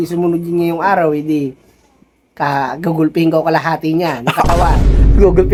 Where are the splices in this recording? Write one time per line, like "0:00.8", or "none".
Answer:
none

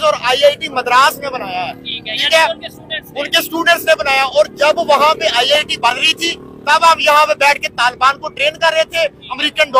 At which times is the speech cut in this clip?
none

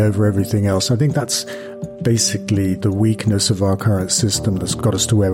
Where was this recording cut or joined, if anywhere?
none

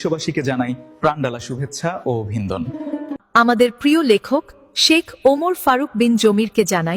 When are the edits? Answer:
0:03.2

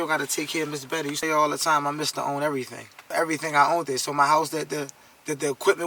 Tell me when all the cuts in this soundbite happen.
0:01.2
0:02.9

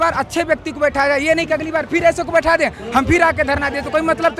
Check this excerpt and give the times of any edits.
none

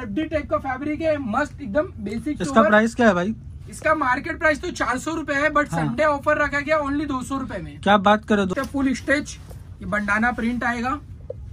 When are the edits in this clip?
0:08.5

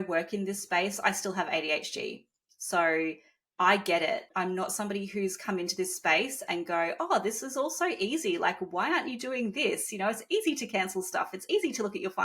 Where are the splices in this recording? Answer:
0:04.2

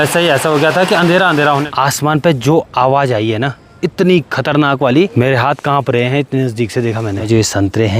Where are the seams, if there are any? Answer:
0:01.6
0:05.1
0:07.3

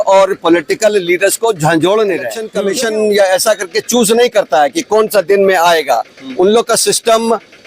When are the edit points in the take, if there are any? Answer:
0:02.4

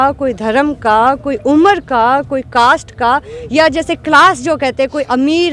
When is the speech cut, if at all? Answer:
none

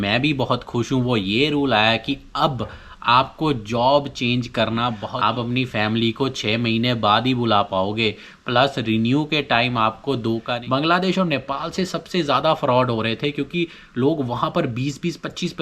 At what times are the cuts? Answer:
0:05.0
0:10.5

